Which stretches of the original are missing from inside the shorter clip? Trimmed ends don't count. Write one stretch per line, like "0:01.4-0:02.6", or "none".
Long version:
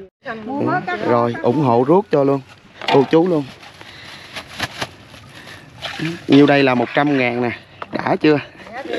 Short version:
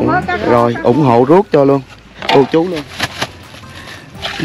0:03.4-0:04.4